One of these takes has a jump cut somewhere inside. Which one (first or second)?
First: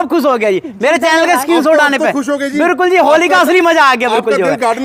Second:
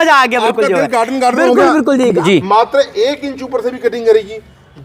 second